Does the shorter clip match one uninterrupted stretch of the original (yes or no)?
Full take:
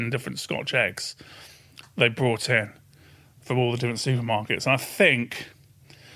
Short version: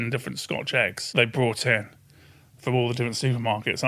no